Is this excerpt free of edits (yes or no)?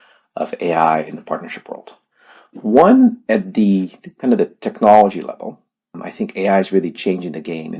no